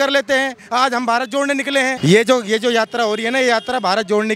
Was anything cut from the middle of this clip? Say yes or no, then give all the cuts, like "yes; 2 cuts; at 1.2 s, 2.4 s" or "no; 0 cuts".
yes; 1 cut; at 2.0 s